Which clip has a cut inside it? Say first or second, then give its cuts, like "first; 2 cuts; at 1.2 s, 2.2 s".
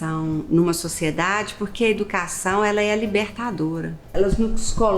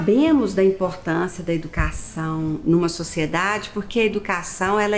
first; 1 cut; at 4.1 s